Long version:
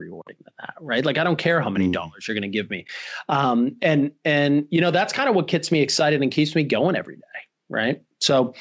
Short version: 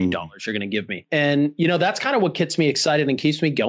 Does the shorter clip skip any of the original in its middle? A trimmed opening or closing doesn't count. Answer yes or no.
yes